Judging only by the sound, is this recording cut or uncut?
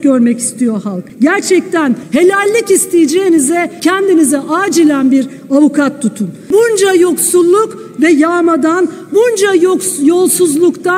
cut